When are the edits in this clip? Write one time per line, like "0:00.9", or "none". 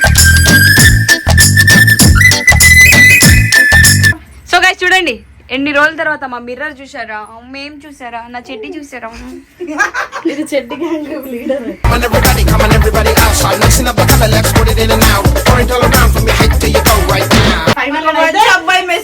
0:04.3
0:17.8